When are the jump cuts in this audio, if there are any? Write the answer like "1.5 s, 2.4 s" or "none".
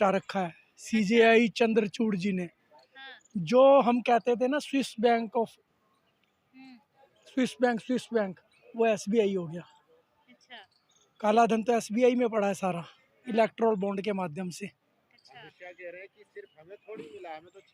none